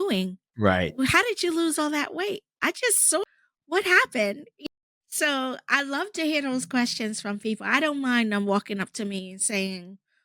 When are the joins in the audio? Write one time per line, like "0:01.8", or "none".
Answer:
0:03.2
0:04.5